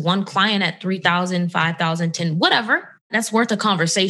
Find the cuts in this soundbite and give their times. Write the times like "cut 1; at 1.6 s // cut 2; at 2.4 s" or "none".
cut 1; at 3.1 s